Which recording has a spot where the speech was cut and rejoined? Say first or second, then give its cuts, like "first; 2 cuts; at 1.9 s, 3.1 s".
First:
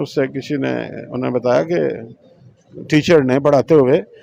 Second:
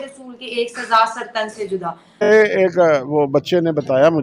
second; 1 cut; at 2.2 s